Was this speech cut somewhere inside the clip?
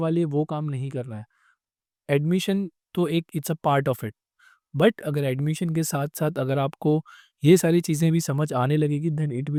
no; 0 cuts

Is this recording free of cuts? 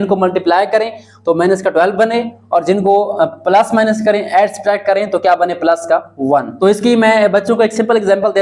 no; 1 cut; at 6.5 s

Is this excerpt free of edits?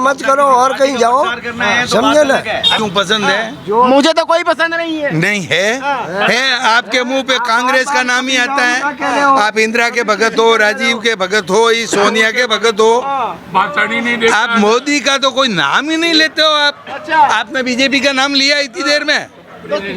no; 1 cut; at 2.7 s

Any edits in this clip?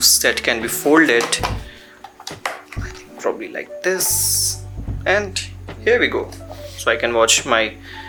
no; 0 cuts

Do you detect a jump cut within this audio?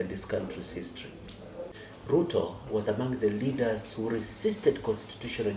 yes; 1 cut; at 1.7 s

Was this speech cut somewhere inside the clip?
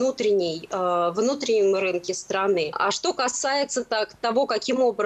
yes; 1 cut; at 2.8 s

